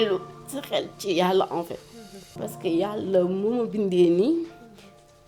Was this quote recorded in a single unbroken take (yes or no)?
yes